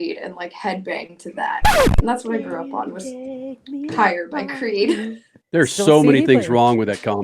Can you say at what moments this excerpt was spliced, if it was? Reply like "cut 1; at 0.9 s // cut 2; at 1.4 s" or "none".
cut 1; at 5.4 s